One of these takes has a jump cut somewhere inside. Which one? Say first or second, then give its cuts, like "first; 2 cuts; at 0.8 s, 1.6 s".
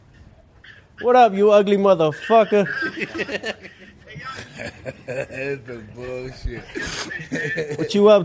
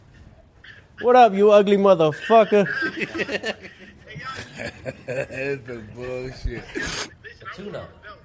second; 1 cut; at 7.2 s